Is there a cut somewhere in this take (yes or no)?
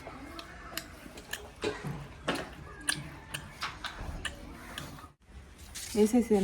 yes